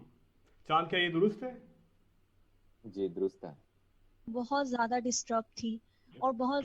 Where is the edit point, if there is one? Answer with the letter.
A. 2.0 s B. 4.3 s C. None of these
B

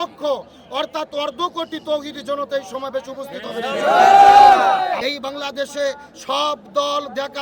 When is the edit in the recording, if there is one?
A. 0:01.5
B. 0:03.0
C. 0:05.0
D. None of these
C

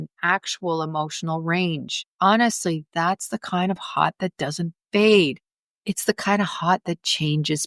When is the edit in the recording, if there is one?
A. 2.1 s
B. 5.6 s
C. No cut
A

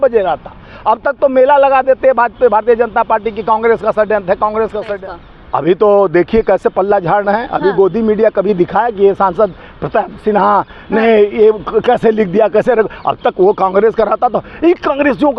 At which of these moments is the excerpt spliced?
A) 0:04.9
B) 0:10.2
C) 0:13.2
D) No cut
A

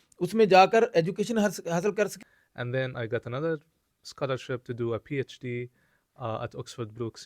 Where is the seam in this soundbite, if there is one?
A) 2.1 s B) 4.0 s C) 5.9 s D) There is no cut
A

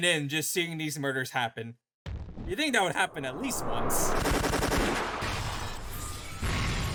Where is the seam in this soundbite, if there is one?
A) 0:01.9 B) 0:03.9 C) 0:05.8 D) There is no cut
D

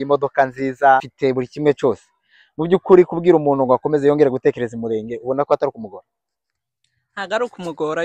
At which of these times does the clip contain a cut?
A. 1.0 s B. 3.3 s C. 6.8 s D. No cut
A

